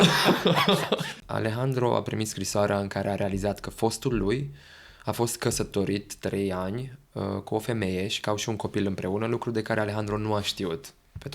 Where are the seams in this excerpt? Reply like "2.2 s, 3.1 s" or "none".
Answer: 1.2 s